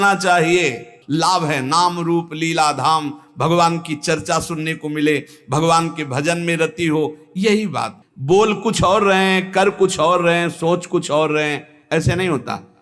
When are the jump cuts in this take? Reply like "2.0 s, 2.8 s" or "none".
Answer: 0.9 s, 8.0 s